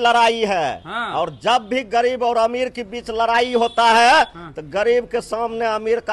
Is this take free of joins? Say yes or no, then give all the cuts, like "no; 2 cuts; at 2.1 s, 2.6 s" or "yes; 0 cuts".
yes; 0 cuts